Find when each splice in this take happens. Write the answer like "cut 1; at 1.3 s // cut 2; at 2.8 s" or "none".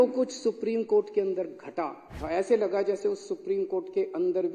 cut 1; at 2.1 s